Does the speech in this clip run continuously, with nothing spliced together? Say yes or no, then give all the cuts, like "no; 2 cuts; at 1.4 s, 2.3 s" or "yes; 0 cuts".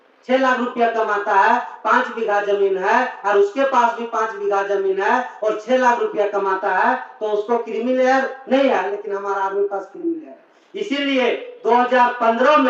yes; 0 cuts